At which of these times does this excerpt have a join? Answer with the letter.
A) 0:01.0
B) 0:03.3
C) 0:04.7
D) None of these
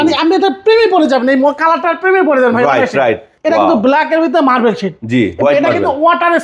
B